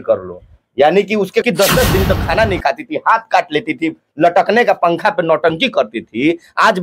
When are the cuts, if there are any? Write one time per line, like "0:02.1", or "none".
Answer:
0:01.5